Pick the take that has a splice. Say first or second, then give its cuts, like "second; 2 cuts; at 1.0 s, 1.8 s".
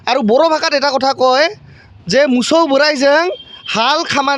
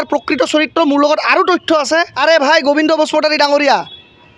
second; 1 cut; at 2.1 s